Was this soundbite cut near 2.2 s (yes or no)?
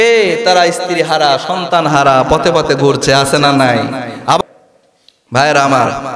no